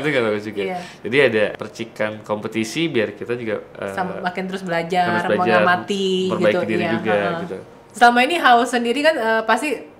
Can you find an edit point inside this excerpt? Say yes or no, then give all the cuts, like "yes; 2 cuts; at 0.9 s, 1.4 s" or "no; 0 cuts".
yes; 1 cut; at 7.6 s